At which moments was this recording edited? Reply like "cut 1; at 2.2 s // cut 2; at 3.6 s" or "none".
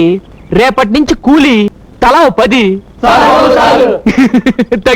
cut 1; at 1.8 s